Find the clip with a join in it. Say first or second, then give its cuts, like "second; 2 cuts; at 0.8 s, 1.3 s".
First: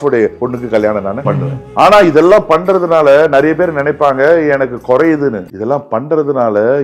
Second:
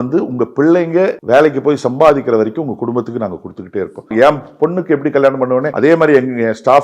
second; 2 cuts; at 4.1 s, 5.7 s